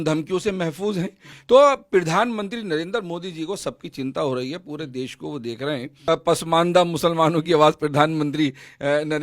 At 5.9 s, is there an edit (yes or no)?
yes